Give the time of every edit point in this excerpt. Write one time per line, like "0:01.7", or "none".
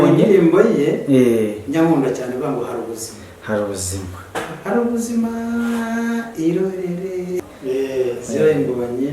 0:07.4

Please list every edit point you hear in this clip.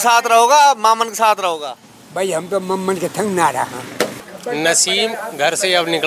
0:04.2

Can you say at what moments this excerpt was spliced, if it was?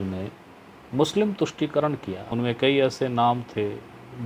0:02.2

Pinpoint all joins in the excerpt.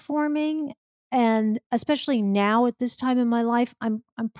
none

